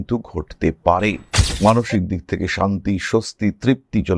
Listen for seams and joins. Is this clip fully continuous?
no; 1 cut; at 1.3 s

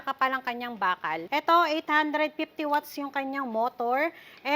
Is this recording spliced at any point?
yes; 1 cut; at 1.2 s

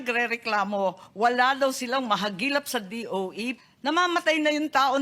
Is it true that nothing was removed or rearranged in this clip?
no; 1 cut; at 3.6 s

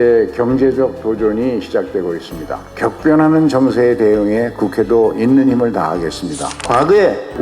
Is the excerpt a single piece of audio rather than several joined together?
no; 2 cuts; at 2.7 s, 6.5 s

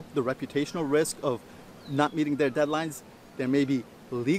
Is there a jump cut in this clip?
no; 0 cuts

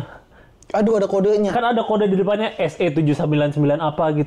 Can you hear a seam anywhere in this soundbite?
no; 0 cuts

